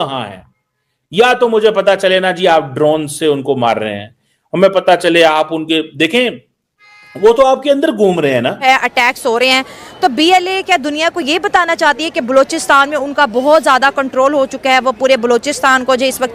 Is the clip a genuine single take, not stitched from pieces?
no; 1 cut; at 8.6 s

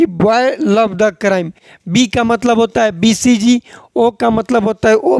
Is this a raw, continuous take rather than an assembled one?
yes; 0 cuts

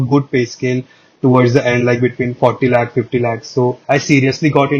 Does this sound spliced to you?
yes; 1 cut; at 3.8 s

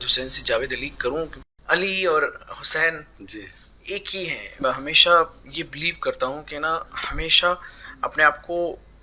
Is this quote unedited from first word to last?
no; 2 cuts; at 1.4 s, 4.6 s

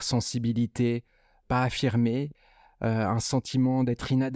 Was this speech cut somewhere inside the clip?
yes; 1 cut; at 2.3 s

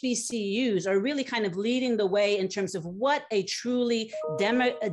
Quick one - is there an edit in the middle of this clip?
no; 0 cuts

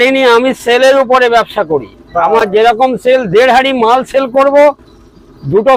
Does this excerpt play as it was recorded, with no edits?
yes; 0 cuts

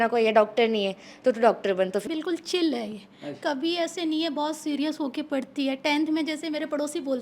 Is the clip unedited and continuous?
no; 1 cut; at 2.1 s

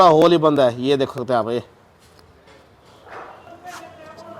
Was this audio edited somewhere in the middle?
yes; 1 cut; at 3.5 s

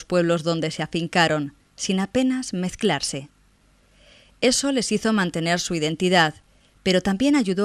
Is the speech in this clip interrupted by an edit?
no; 0 cuts

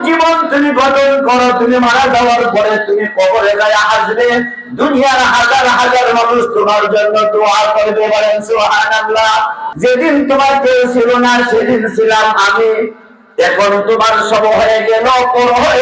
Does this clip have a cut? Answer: yes; 1 cut; at 9.6 s

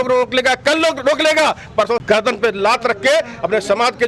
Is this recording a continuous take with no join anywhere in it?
no; 1 cut; at 2.0 s

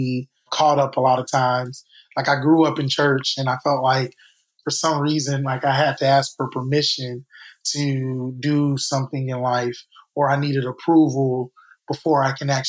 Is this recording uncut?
yes; 0 cuts

